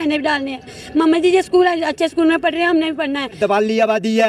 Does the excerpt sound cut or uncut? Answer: cut